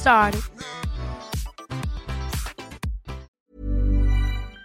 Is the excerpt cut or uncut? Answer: cut